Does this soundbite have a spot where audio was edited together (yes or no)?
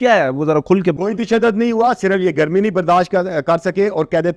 yes